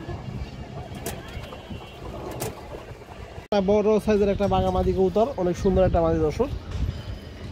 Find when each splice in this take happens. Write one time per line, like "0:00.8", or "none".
none